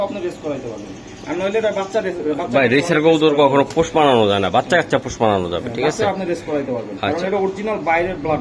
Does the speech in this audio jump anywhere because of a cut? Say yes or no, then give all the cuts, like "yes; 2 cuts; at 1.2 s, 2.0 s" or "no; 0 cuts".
no; 0 cuts